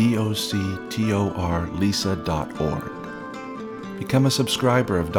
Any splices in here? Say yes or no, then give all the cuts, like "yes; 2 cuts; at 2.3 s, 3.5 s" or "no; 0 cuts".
no; 0 cuts